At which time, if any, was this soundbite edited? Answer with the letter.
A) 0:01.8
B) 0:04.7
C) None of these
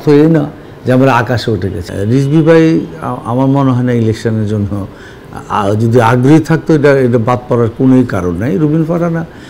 A